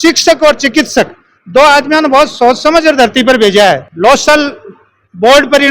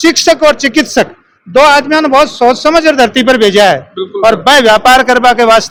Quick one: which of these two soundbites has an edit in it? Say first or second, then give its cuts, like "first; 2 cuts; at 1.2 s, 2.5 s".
first; 1 cut; at 3.9 s